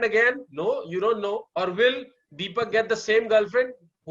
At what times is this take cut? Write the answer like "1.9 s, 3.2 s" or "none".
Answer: 1.5 s